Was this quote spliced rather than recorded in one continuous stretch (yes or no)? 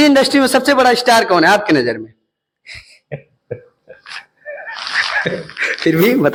no